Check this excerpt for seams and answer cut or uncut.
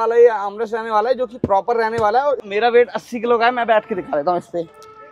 cut